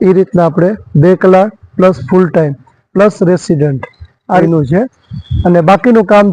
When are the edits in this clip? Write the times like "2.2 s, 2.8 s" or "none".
4.4 s